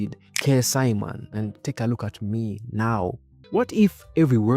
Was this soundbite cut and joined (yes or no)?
yes